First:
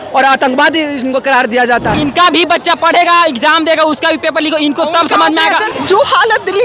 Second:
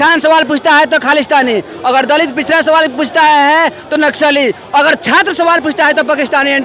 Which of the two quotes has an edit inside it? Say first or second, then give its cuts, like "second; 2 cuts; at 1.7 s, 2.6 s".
first; 2 cuts; at 1.9 s, 5.7 s